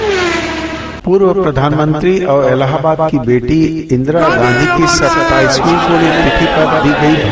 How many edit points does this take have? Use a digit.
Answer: 1